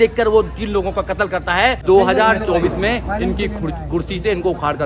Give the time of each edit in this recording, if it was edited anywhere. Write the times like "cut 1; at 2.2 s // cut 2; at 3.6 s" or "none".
cut 1; at 1.8 s